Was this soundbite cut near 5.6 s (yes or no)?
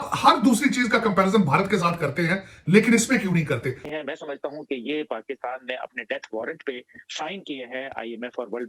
no